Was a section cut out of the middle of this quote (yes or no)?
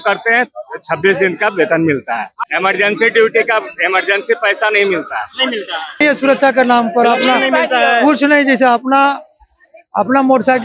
yes